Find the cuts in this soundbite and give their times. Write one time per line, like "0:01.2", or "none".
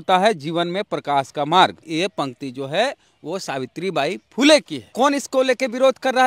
0:01.8
0:04.9